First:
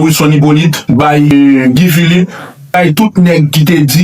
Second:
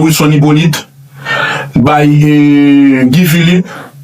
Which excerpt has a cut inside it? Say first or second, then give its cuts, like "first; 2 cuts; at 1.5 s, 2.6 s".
first; 2 cuts; at 1.3 s, 2.7 s